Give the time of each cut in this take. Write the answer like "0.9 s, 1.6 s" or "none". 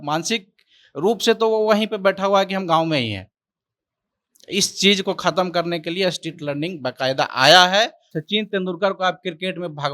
8.1 s